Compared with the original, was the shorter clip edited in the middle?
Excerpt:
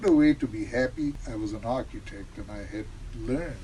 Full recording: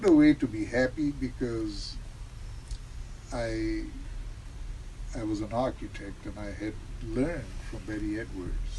yes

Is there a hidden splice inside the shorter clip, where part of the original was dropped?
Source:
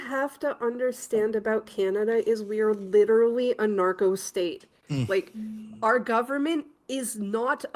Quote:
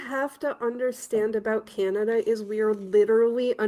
no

